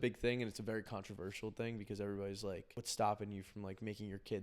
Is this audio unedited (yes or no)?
no